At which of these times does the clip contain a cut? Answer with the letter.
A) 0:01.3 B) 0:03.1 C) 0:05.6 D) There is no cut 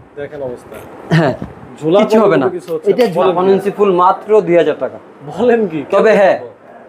B